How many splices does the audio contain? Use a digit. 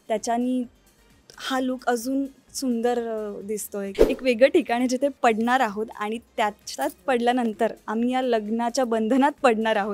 1